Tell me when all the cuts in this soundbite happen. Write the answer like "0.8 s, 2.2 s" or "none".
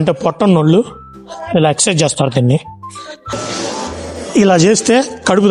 3.3 s